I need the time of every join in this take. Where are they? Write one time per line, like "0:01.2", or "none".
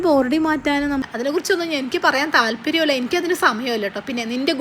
0:01.0